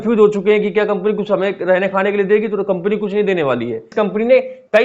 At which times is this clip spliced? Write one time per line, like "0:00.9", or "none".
0:03.9